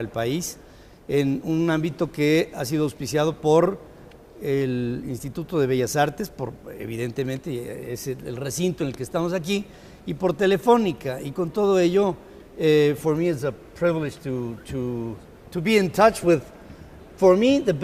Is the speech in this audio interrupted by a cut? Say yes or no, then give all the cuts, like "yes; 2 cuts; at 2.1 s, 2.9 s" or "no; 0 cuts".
no; 0 cuts